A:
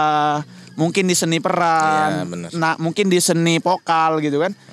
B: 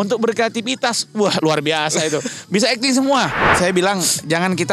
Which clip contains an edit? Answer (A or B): B